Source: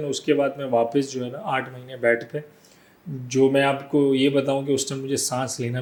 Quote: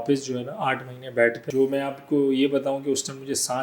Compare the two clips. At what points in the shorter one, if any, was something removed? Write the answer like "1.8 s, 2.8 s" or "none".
1.4 s